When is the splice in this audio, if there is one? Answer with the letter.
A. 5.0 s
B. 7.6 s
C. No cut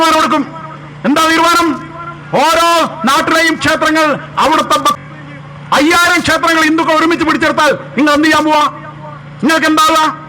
A